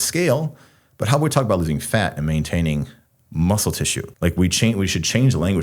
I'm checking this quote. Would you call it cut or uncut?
cut